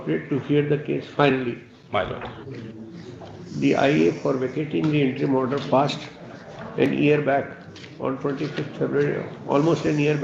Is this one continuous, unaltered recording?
yes; 0 cuts

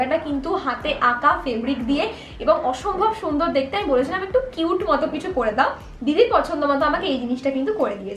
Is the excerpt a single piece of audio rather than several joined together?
yes; 0 cuts

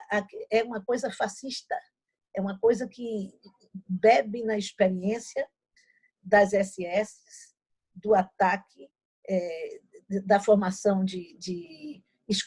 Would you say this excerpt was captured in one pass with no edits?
yes; 0 cuts

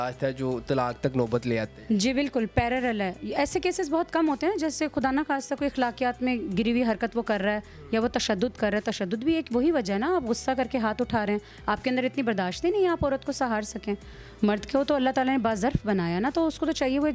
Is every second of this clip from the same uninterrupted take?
yes; 0 cuts

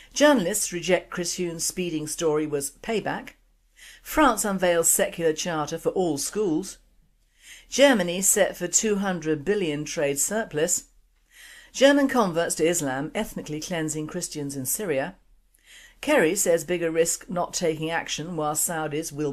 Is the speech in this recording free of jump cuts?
no; 1 cut; at 17.2 s

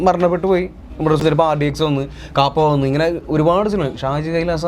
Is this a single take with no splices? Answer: no; 1 cut; at 1.2 s

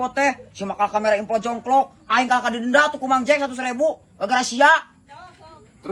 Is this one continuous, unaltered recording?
yes; 0 cuts

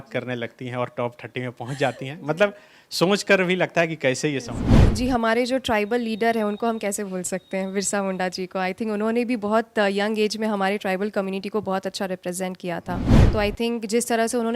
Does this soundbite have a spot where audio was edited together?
yes; 2 cuts; at 4.8 s, 13.1 s

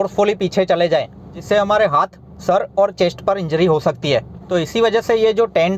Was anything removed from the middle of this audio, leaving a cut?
yes; 1 cut; at 4.4 s

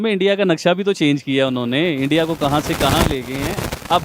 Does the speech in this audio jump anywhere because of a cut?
no; 0 cuts

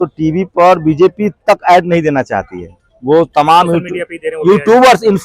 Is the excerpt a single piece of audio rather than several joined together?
yes; 0 cuts

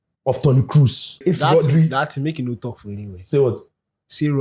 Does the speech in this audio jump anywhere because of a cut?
yes; 1 cut; at 1.2 s

